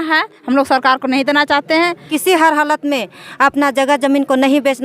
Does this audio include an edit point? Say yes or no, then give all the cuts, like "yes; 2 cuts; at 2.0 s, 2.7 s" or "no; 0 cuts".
yes; 1 cut; at 2.1 s